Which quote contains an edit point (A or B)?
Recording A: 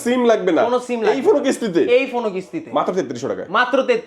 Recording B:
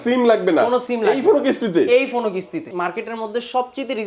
B